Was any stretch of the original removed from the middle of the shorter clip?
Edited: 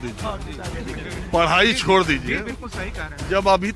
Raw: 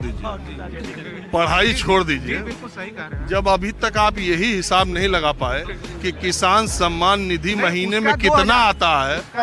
no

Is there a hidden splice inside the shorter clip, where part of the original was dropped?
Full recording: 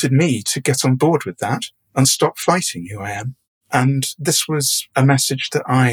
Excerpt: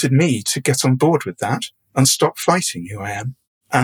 no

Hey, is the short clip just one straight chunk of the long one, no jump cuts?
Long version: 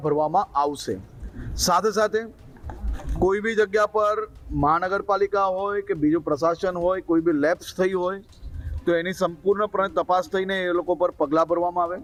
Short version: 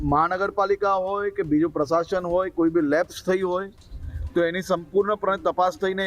yes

